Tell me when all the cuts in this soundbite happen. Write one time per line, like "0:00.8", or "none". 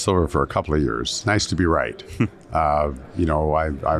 0:01.2